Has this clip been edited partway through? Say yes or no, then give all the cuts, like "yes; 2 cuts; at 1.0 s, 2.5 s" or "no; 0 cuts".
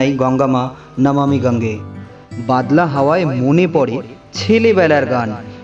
yes; 1 cut; at 2.0 s